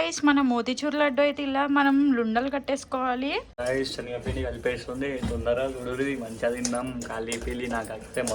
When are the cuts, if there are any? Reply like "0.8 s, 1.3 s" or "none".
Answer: 3.5 s